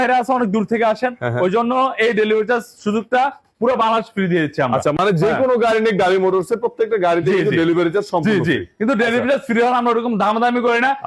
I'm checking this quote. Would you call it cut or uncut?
uncut